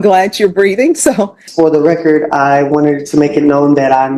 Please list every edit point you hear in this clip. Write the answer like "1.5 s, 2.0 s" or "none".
1.4 s

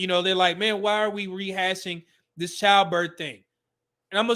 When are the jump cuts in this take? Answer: none

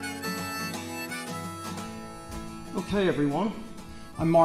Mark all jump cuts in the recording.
none

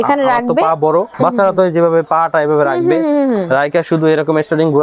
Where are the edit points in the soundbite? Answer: 1.1 s

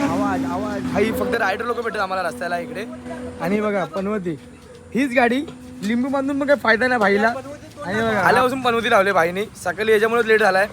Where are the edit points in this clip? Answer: 8.2 s

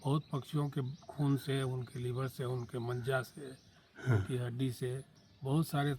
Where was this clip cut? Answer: none

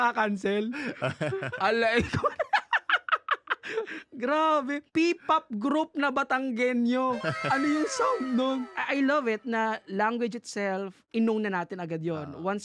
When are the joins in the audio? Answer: none

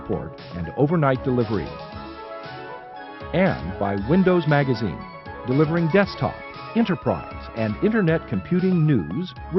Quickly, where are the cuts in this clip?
none

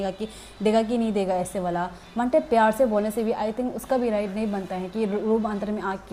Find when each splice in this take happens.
none

